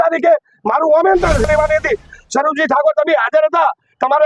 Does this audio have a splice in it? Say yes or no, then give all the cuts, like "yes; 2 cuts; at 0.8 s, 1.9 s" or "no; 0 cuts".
yes; 1 cut; at 1.5 s